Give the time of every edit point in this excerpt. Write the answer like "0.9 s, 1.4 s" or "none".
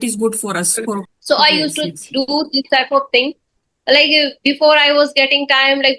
1.1 s